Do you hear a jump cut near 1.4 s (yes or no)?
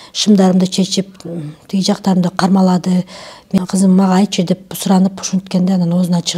no